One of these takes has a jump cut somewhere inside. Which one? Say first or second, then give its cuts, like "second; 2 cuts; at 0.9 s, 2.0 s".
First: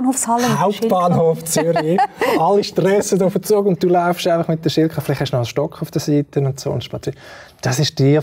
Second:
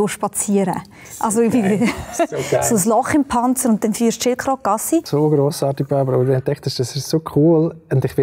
second; 1 cut; at 5.1 s